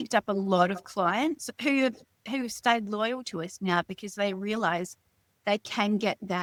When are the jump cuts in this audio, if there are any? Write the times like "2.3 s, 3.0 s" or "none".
none